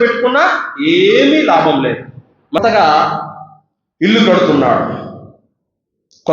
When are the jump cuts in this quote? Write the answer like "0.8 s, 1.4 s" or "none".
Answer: 2.6 s

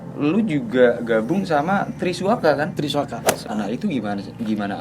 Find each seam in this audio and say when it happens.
3.4 s

